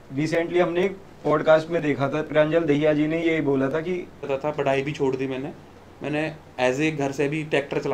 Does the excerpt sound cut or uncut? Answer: cut